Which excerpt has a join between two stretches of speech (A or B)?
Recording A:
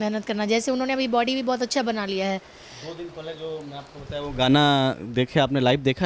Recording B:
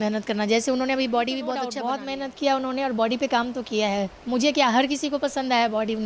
B